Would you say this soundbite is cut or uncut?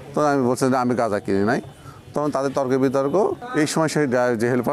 cut